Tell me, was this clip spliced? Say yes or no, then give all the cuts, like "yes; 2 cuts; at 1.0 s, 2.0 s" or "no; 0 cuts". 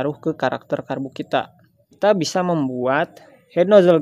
yes; 1 cut; at 2.0 s